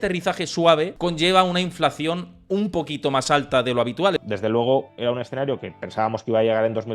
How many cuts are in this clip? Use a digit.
2